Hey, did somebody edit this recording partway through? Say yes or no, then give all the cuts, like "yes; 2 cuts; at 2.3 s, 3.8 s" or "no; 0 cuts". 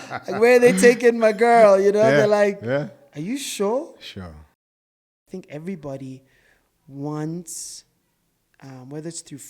yes; 1 cut; at 4.9 s